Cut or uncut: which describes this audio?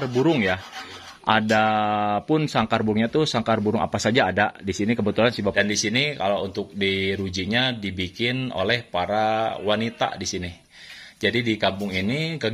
cut